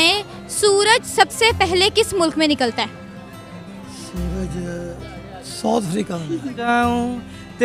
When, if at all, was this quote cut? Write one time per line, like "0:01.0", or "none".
0:06.7